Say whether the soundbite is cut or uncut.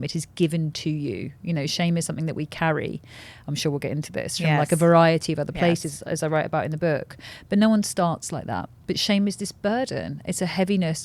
uncut